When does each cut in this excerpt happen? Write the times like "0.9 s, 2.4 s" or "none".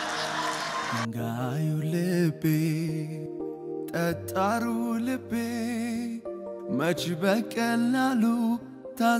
1.0 s